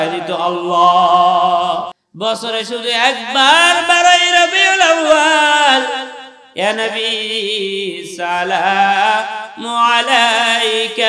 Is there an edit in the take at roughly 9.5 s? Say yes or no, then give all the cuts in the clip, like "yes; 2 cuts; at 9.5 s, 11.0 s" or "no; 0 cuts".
no; 1 cut; at 2.0 s